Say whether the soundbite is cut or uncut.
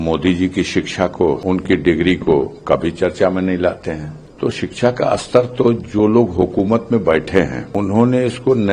cut